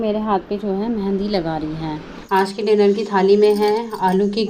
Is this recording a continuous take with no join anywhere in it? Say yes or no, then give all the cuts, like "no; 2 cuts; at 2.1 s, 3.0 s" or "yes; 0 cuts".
no; 1 cut; at 2.1 s